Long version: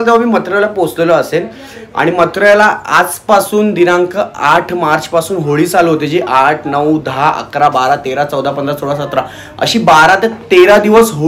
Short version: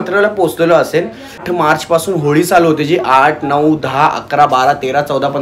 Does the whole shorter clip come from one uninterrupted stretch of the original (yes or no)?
no